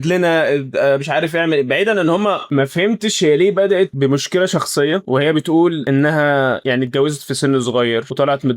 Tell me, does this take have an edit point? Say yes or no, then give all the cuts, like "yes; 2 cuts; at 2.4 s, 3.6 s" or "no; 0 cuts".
yes; 1 cut; at 2.4 s